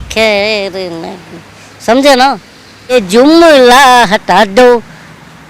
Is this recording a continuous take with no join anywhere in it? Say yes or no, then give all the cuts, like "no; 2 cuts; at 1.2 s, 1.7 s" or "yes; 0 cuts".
no; 1 cut; at 2.9 s